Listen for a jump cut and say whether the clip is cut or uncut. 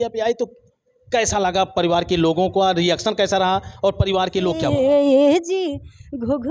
cut